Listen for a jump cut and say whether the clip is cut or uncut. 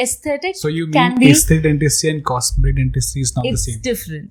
uncut